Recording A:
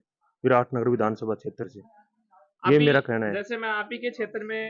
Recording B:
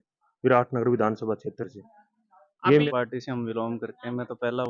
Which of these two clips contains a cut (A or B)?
B